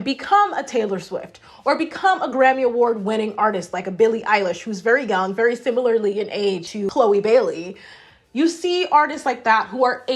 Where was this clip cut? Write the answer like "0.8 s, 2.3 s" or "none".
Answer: 6.6 s